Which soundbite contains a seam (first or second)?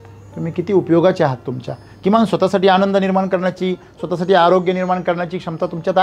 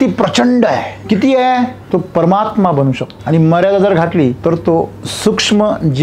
second